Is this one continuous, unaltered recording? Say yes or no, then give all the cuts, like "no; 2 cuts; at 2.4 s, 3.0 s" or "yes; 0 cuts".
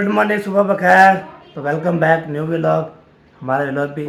yes; 0 cuts